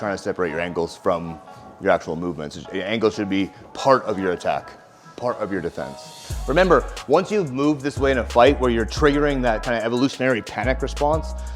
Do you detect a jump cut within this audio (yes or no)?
yes